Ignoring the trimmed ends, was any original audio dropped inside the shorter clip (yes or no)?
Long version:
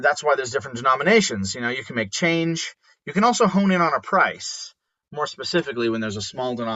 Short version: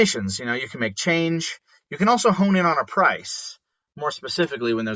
no